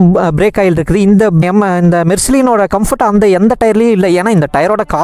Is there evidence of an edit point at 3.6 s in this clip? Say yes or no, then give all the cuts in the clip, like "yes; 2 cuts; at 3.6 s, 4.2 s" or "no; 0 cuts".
no; 1 cut; at 1.4 s